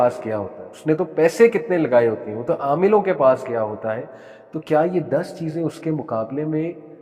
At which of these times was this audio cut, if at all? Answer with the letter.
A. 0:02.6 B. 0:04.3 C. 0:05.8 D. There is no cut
D